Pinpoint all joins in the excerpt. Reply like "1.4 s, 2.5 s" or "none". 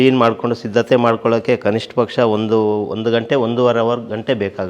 none